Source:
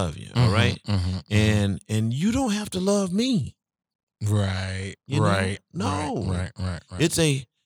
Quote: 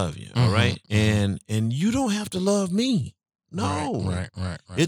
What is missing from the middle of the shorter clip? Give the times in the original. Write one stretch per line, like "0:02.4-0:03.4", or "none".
0:00.8-0:01.2
0:03.8-0:05.6